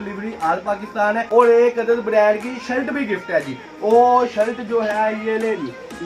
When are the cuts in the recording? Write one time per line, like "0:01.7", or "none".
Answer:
0:01.3